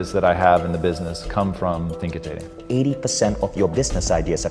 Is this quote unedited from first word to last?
no; 1 cut; at 2.6 s

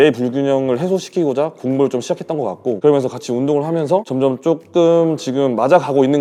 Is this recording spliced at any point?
no; 0 cuts

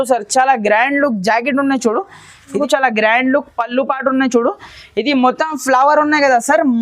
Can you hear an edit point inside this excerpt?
yes; 1 cut; at 2.5 s

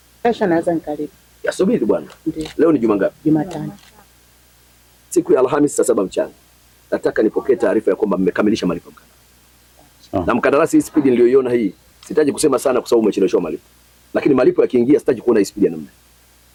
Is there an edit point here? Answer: no; 0 cuts

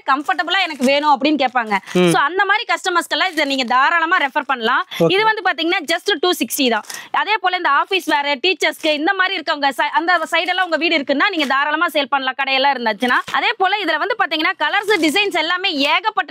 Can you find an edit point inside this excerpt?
no; 0 cuts

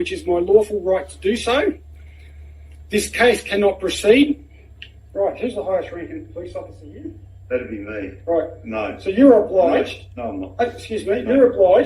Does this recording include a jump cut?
no; 0 cuts

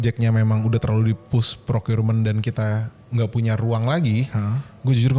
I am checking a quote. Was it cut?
no; 0 cuts

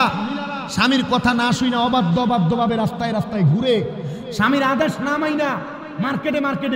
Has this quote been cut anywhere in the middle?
no; 0 cuts

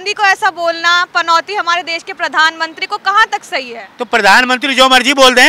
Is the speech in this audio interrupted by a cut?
no; 0 cuts

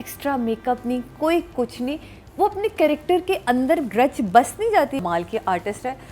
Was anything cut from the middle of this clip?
yes; 1 cut; at 5.0 s

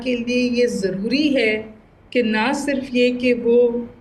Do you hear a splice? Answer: no; 0 cuts

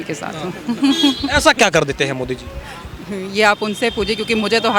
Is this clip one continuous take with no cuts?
yes; 0 cuts

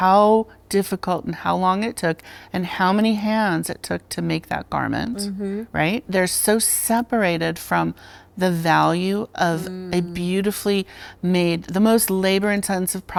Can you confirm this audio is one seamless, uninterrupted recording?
yes; 0 cuts

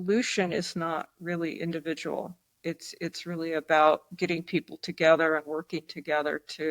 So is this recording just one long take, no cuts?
yes; 0 cuts

